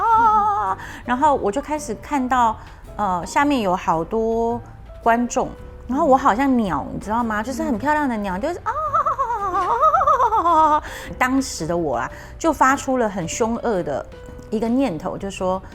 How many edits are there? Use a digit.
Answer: 0